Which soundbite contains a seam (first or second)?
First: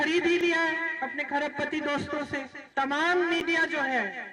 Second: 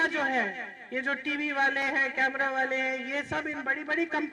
first